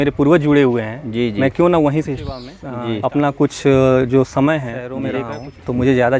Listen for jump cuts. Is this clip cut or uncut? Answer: cut